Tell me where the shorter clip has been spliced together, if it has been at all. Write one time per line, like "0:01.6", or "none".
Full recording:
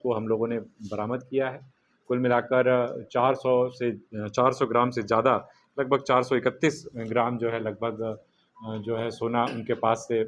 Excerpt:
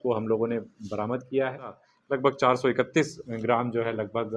0:01.9

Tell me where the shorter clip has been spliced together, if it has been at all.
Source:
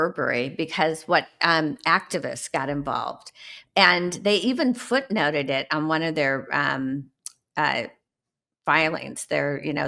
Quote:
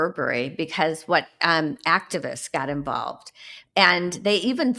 none

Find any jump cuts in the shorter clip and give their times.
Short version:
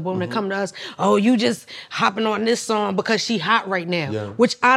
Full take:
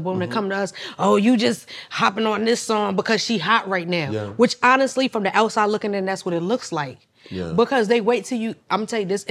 none

